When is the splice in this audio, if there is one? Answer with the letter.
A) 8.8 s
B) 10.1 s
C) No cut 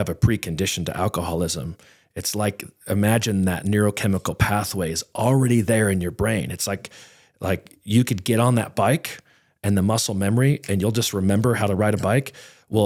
C